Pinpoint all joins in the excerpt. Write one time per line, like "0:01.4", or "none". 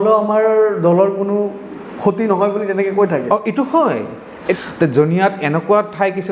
0:04.6